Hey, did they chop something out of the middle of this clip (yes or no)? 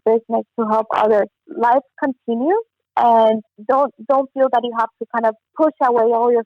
yes